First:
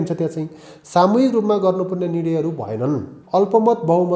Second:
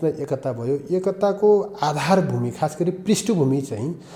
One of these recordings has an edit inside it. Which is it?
first; 1 cut; at 3.1 s

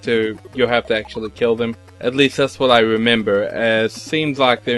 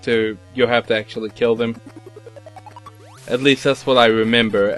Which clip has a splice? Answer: first; 1 cut; at 1.9 s

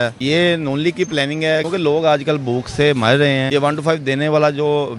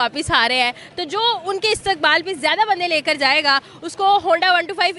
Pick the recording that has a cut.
first; 2 cuts; at 1.6 s, 3.5 s

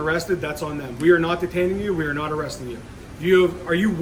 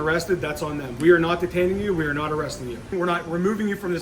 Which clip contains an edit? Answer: second; 1 cut; at 2.9 s

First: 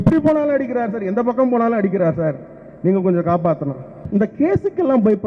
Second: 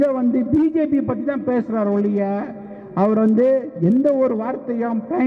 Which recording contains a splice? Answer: first; 1 cut; at 4.0 s

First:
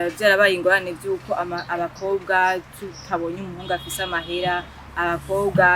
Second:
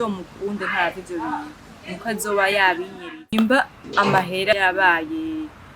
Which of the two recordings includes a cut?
second; 2 cuts; at 3.3 s, 4.5 s

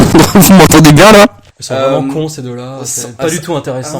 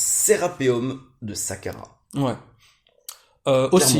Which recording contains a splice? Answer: first; 1 cut; at 1.5 s

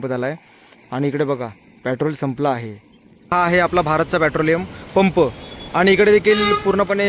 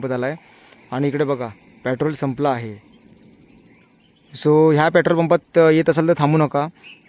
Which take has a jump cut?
first; 1 cut; at 3.3 s

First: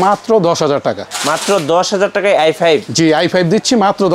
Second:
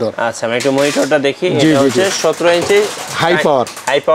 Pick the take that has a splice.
first; 2 cuts; at 1.1 s, 2.9 s

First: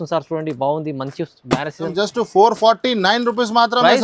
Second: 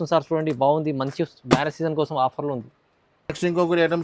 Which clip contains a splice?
first; 1 cut; at 1.9 s

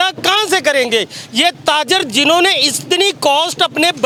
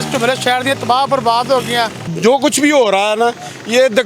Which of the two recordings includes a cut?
second; 1 cut; at 2.1 s

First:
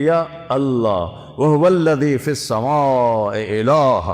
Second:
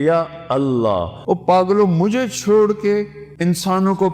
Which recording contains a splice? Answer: second; 2 cuts; at 1.1 s, 3.2 s

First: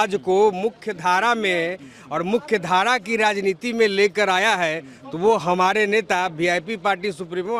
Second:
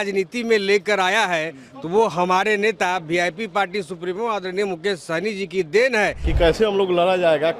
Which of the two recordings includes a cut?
second; 1 cut; at 6.2 s

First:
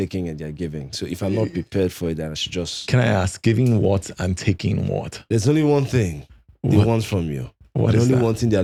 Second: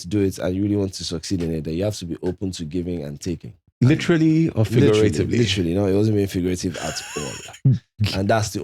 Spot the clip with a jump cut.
second; 1 cut; at 3.6 s

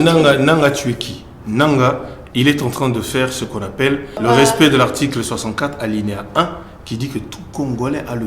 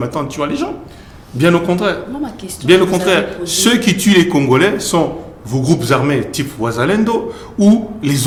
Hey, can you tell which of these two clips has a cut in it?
first; 1 cut; at 4.2 s

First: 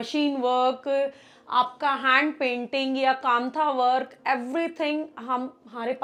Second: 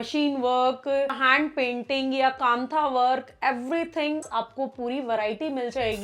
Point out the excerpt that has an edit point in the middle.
second; 2 cuts; at 1.2 s, 4.3 s

